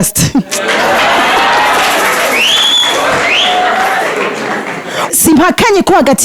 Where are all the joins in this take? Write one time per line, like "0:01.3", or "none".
0:05.1